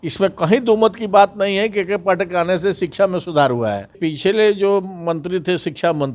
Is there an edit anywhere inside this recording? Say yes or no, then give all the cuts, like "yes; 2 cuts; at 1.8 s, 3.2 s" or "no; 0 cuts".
yes; 1 cut; at 4.0 s